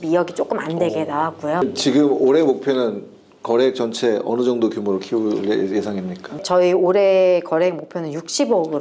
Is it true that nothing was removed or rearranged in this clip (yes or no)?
no